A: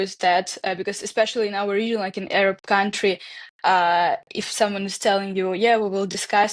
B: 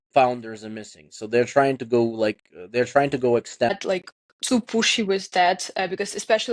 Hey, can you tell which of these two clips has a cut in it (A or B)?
B